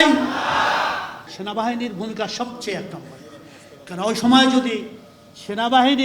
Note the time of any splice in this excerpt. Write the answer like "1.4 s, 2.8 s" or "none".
1.1 s